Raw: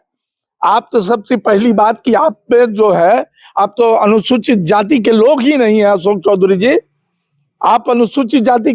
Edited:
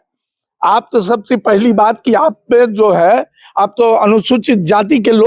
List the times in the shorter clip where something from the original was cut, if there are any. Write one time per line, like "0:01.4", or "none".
none